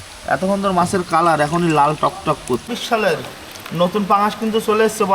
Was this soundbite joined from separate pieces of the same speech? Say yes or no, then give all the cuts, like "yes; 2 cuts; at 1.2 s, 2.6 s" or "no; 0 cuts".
yes; 1 cut; at 2.6 s